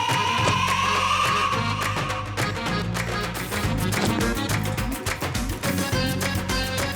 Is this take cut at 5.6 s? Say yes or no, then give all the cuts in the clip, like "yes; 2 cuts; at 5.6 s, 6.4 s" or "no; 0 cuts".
no; 1 cut; at 3.4 s